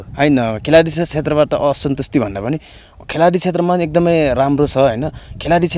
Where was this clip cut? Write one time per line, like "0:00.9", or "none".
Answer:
none